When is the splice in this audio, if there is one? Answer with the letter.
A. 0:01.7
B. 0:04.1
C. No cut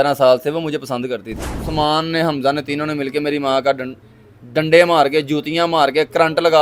A